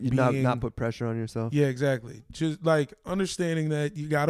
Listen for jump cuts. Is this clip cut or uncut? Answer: uncut